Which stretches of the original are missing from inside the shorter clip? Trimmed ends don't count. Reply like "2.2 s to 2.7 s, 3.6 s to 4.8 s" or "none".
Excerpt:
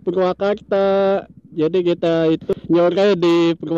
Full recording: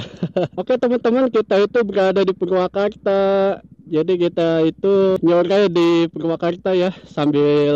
4.9 s to 5.1 s